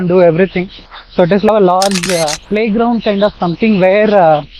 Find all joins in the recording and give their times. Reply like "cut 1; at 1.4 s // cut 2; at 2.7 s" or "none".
cut 1; at 1.5 s

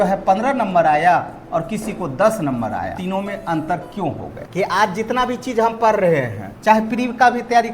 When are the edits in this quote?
cut 1; at 3.0 s // cut 2; at 4.3 s

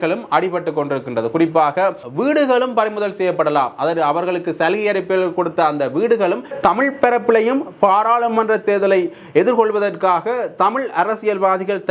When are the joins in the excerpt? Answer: cut 1; at 2.1 s // cut 2; at 6.5 s

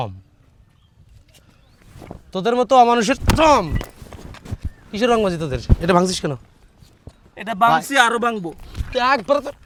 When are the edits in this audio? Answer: none

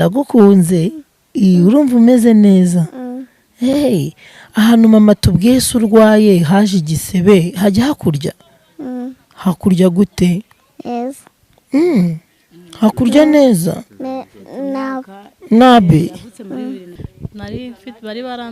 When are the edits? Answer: cut 1; at 16.9 s

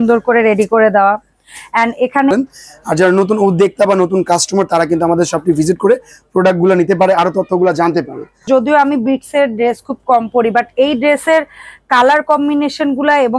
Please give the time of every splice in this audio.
cut 1; at 2.3 s // cut 2; at 8.4 s

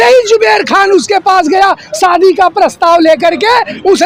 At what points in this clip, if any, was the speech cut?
none

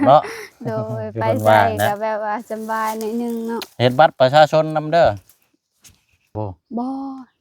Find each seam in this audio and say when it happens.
cut 1; at 6.3 s

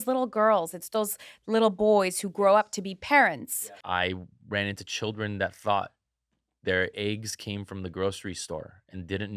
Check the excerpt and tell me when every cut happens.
cut 1; at 3.6 s

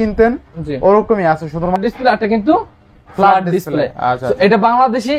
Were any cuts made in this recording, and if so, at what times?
cut 1; at 1.7 s

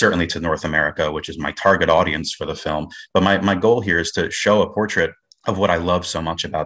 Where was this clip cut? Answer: cut 1; at 5.3 s

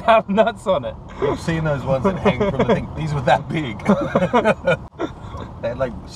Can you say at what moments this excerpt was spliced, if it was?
none

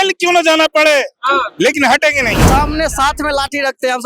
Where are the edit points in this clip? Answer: cut 1; at 2.4 s

